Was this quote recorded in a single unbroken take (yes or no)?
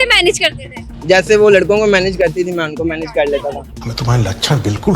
no